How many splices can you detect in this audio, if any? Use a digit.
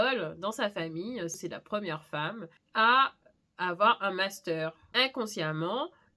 3